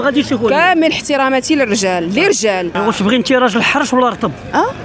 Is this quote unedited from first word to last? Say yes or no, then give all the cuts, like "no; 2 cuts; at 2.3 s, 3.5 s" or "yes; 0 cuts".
no; 1 cut; at 2.7 s